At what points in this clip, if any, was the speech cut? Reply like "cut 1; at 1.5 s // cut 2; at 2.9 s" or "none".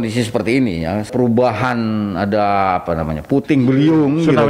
cut 1; at 1.1 s